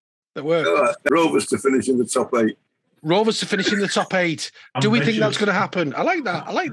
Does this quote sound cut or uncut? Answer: cut